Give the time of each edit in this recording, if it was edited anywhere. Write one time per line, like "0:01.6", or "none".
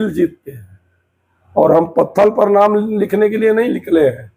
none